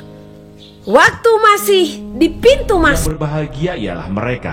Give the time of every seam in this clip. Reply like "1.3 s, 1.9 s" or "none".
3.0 s